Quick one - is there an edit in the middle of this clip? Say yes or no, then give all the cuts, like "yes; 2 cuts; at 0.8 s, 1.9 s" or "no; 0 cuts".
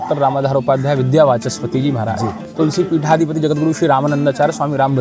yes; 1 cut; at 2.4 s